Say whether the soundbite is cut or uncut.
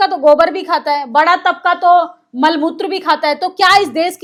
uncut